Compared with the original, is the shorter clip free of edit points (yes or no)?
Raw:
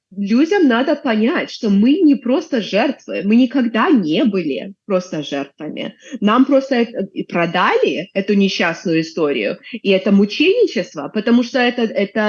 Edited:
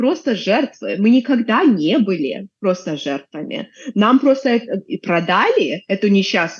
yes